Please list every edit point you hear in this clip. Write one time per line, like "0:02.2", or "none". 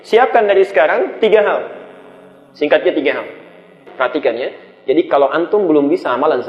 0:03.8